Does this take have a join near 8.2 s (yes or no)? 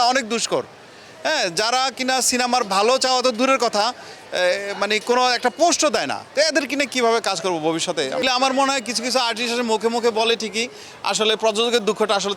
yes